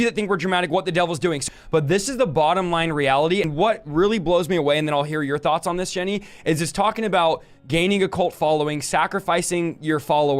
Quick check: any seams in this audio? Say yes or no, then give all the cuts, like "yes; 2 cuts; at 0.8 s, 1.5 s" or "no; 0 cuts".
yes; 1 cut; at 1.5 s